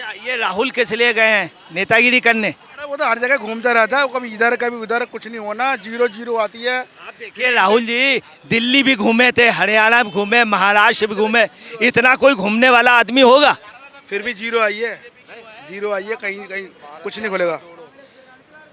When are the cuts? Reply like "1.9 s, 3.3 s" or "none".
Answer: none